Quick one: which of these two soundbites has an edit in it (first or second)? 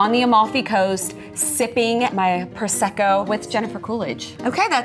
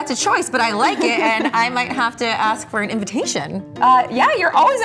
first